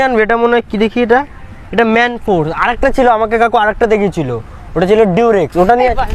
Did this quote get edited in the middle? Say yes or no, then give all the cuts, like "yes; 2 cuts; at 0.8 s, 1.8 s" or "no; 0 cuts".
no; 0 cuts